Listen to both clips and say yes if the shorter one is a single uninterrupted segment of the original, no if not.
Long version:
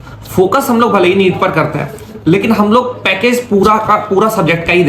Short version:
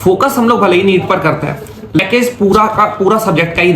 no